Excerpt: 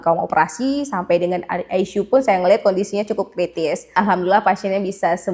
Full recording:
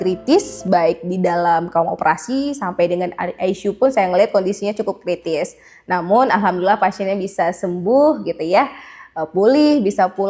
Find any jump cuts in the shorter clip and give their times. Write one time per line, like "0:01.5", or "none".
0:03.9